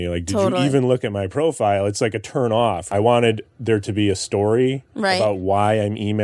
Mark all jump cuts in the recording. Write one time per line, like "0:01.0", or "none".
0:02.9